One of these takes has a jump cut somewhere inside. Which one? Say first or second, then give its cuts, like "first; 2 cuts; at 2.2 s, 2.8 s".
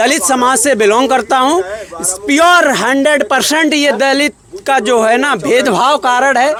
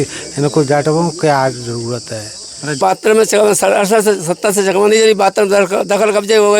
second; 1 cut; at 2.8 s